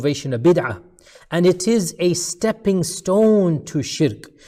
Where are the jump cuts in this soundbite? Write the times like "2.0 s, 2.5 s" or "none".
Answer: none